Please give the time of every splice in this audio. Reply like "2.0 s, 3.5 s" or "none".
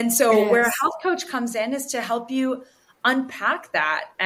none